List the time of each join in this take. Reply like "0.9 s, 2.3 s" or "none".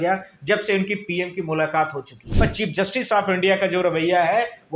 2.3 s